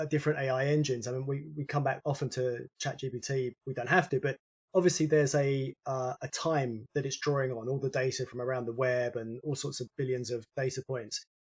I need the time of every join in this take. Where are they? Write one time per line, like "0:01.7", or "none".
0:03.6
0:06.8